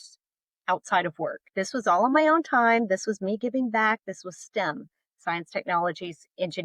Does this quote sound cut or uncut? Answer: cut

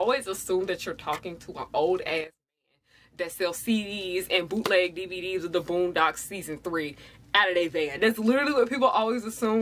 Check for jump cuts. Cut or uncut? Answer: uncut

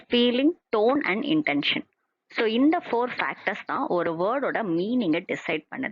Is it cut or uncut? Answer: cut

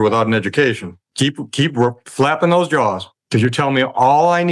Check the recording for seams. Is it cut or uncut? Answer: cut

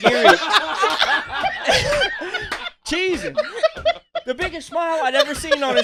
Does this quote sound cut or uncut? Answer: uncut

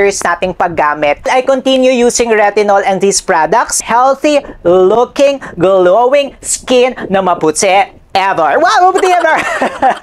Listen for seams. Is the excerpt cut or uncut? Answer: cut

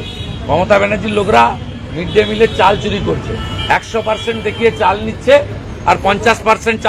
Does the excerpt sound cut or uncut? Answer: uncut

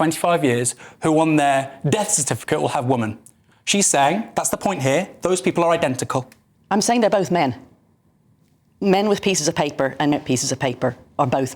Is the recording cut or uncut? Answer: cut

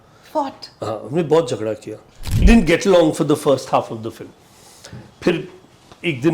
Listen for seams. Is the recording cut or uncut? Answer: cut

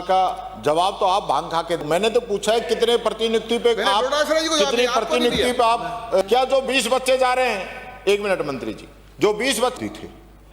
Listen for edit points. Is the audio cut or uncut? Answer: cut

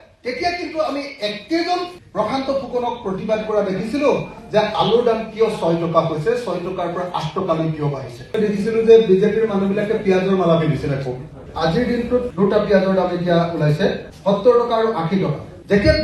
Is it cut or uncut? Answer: uncut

